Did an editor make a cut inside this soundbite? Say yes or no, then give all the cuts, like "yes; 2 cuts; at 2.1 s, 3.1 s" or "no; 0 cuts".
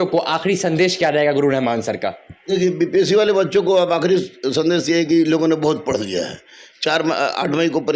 no; 0 cuts